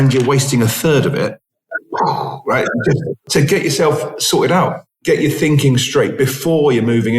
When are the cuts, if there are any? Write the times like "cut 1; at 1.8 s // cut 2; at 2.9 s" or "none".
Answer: cut 1; at 3.2 s